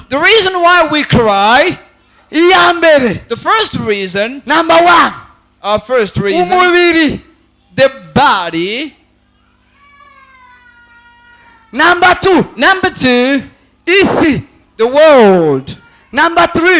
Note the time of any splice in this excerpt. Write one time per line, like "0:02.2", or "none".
0:02.2